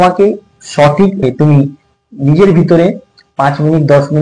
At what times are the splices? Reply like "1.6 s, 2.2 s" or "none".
1.2 s